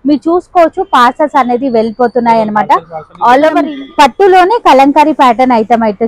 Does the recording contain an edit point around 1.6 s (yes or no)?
no